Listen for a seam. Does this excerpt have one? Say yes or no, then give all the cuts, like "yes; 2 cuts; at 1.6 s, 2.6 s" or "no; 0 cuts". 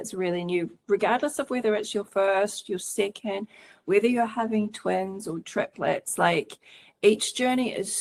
no; 0 cuts